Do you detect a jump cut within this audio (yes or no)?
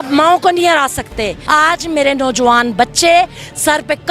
yes